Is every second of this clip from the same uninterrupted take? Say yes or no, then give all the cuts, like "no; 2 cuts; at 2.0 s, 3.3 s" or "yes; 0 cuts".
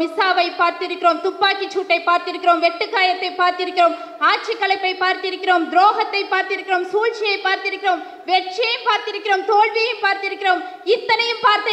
yes; 0 cuts